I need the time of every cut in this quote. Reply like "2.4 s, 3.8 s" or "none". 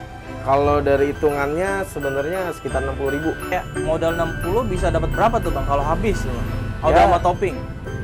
3.5 s

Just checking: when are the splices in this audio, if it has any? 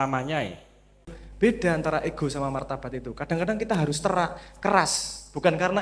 1.2 s

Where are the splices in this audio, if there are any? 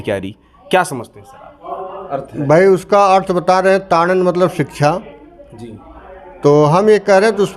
2.0 s

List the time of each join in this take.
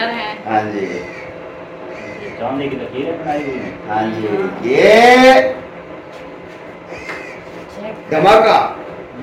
none

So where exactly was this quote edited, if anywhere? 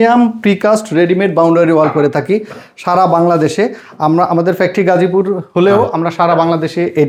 none

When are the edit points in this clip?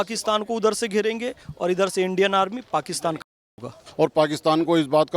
3.8 s

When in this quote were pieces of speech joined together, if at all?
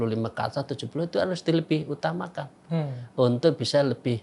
none

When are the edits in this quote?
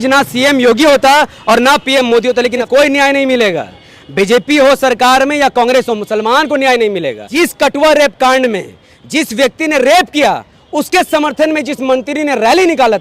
2.6 s, 7.2 s

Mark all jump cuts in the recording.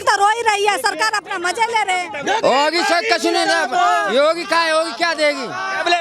2.1 s

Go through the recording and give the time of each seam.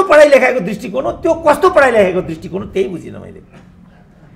none

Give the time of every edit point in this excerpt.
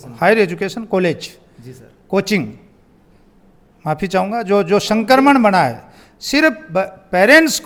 none

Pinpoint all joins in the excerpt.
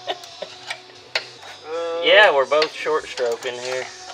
1.4 s

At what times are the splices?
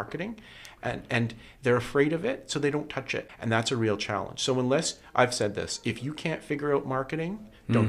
3.2 s

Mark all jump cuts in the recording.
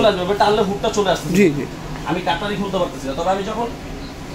none

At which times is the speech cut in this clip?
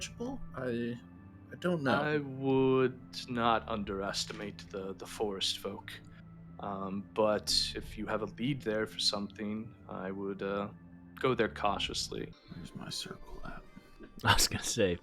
12.4 s

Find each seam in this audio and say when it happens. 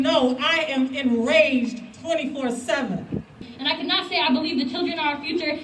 3.5 s

